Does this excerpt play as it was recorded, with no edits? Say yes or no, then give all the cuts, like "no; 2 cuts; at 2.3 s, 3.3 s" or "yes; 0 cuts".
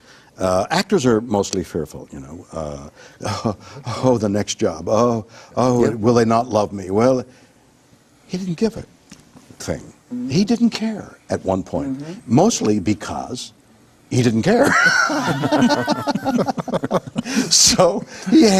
no; 1 cut; at 11.1 s